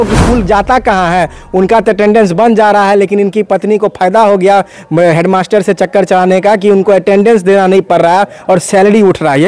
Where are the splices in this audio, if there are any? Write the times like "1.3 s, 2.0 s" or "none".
none